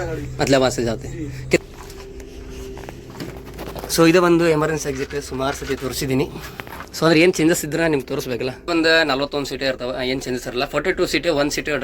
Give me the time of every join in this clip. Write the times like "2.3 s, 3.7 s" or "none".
1.6 s, 8.6 s